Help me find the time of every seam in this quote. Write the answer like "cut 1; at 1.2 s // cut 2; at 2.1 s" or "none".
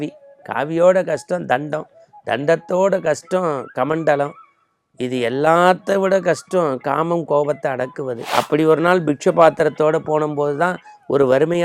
cut 1; at 8.2 s